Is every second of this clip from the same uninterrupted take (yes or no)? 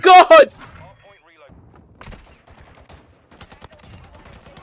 no